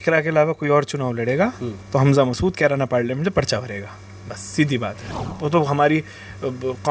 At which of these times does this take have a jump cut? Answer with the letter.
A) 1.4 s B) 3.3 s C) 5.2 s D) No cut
C